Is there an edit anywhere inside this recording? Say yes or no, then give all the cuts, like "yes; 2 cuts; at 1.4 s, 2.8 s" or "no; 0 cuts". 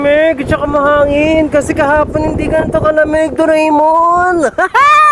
no; 0 cuts